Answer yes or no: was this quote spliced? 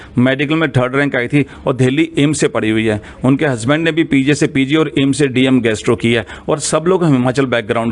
no